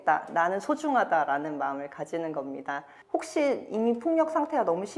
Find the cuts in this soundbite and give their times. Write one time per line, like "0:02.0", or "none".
0:02.9